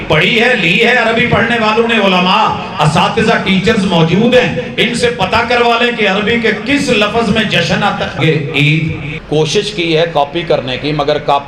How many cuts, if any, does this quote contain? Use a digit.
2